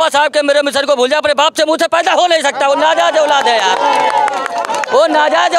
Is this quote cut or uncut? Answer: uncut